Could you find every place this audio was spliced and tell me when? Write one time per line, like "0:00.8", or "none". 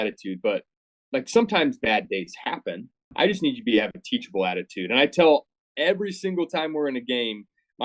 0:03.1